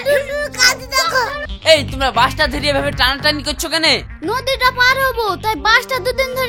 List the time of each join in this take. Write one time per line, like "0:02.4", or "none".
0:01.3